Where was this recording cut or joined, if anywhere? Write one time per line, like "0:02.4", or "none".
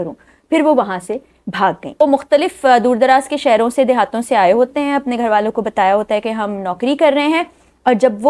0:02.0